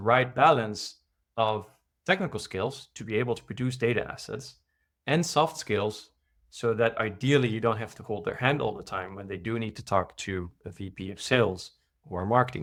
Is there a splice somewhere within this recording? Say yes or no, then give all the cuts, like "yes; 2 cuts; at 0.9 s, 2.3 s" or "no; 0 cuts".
no; 0 cuts